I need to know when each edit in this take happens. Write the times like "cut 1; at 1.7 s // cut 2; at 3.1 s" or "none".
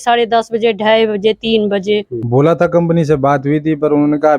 cut 1; at 2.2 s